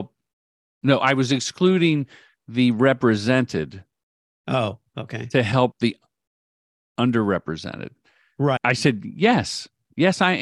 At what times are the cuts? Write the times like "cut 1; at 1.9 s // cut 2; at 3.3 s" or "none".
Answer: cut 1; at 8.7 s